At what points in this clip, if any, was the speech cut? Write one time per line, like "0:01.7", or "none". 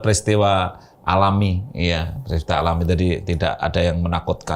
none